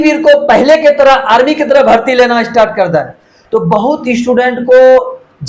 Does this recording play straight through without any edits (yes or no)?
yes